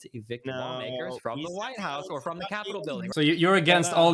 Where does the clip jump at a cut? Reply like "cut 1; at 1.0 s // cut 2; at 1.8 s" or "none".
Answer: cut 1; at 3.1 s